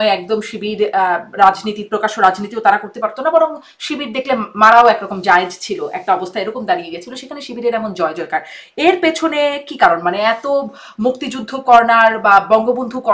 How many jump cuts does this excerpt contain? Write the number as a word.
zero